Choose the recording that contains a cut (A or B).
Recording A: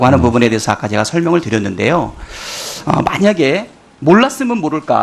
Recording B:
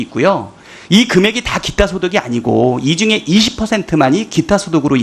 A